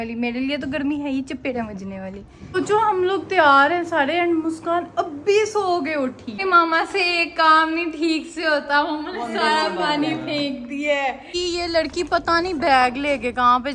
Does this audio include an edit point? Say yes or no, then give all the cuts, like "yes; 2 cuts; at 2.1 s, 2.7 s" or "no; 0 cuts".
yes; 3 cuts; at 2.5 s, 6.4 s, 11.3 s